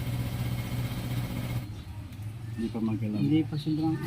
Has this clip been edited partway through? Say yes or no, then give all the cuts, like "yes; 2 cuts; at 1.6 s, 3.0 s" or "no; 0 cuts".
yes; 1 cut; at 1.6 s